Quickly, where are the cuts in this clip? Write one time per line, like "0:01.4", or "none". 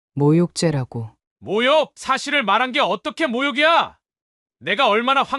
none